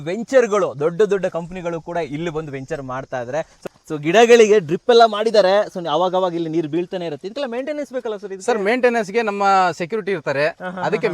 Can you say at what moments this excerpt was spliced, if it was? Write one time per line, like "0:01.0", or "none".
0:03.6